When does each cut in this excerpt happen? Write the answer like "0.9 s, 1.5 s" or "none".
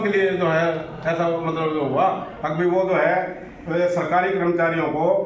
none